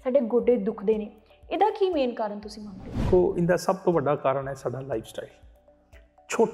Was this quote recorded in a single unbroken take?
no; 1 cut; at 3.1 s

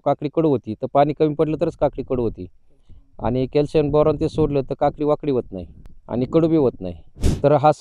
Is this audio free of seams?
yes; 0 cuts

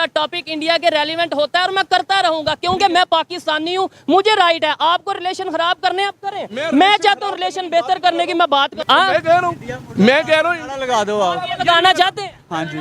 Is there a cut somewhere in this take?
yes; 1 cut; at 8.8 s

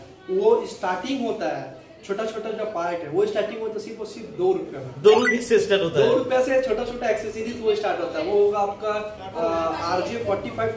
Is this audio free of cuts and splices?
yes; 0 cuts

